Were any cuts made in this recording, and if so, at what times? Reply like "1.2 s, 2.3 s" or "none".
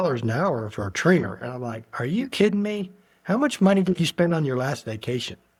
none